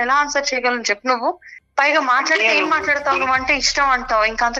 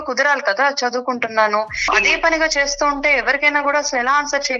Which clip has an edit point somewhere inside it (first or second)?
second